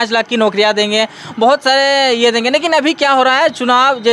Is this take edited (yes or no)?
no